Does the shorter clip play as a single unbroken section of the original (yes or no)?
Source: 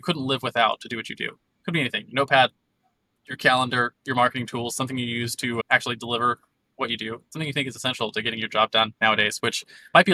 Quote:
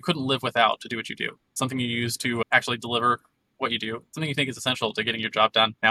no